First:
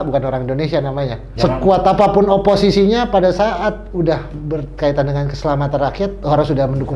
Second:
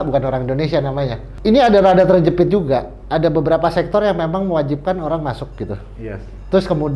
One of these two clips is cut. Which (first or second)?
first